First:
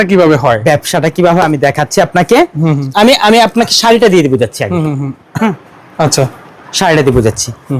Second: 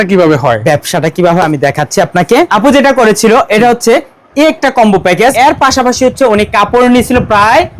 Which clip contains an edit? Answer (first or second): second